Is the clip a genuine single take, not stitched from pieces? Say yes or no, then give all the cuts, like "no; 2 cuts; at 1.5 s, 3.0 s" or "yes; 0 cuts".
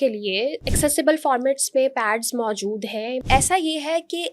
no; 1 cut; at 3.2 s